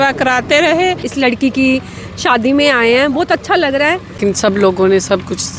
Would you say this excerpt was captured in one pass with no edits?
no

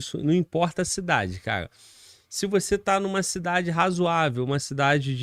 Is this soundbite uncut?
yes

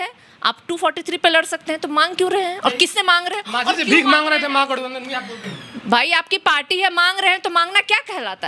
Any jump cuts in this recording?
no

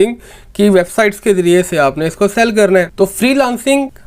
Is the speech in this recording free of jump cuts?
yes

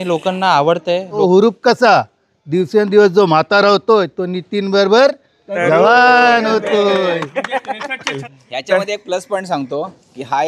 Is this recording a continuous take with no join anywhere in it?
no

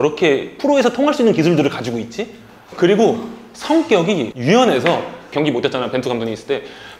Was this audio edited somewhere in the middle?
yes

